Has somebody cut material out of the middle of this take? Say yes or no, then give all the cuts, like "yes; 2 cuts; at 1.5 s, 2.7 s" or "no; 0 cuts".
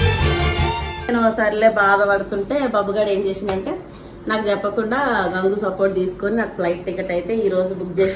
yes; 1 cut; at 1.1 s